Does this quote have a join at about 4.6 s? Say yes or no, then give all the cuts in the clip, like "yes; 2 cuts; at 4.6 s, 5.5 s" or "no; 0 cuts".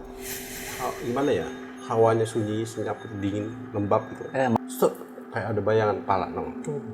yes; 1 cut; at 4.6 s